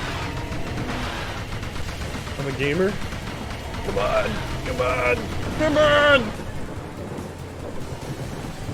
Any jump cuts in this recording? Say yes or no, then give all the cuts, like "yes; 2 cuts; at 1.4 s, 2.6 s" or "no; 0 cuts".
no; 0 cuts